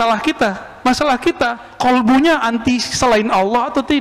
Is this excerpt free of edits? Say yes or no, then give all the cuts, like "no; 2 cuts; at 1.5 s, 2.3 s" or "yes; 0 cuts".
no; 1 cut; at 1.6 s